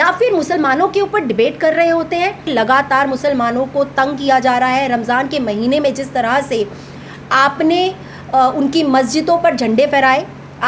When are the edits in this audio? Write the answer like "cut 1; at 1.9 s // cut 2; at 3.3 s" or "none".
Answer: cut 1; at 2.5 s